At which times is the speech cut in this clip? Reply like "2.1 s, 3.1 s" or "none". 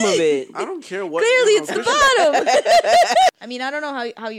3.3 s